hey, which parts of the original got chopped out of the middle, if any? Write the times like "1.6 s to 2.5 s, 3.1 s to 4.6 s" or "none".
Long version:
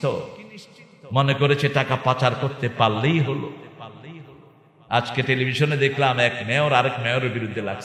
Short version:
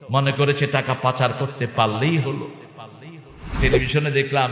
4.6 s to 5.2 s